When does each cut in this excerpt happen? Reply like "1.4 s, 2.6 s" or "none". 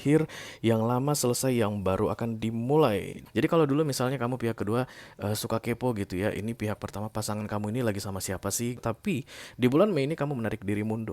3.1 s, 8.8 s